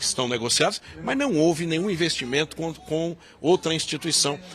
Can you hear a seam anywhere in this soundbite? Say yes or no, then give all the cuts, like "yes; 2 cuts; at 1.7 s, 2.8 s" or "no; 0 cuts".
no; 0 cuts